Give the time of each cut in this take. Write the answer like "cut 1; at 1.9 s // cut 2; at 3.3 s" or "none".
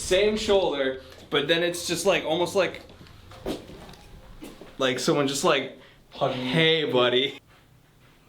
cut 1; at 7.3 s